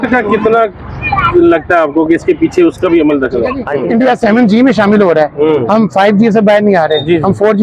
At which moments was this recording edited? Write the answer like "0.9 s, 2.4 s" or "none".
3.7 s